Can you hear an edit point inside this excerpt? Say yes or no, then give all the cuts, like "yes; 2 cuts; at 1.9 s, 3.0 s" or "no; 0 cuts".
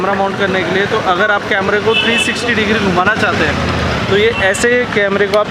no; 0 cuts